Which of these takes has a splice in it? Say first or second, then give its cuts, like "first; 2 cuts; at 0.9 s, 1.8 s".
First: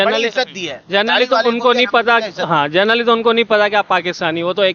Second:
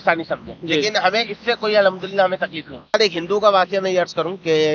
second; 1 cut; at 2.9 s